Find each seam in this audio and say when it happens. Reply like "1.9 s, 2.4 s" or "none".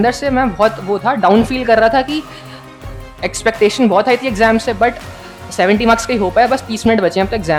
none